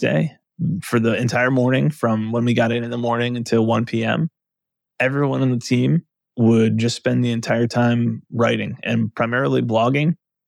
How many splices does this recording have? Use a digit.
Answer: 0